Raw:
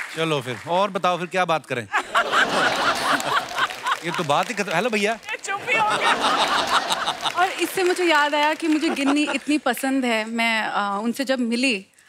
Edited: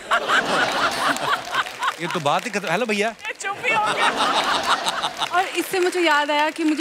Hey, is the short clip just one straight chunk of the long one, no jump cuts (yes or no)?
yes